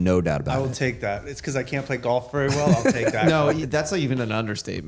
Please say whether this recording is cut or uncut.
cut